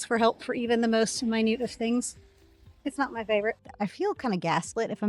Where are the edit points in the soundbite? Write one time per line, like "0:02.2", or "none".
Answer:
0:03.7